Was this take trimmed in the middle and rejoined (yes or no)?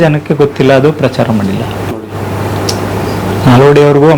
no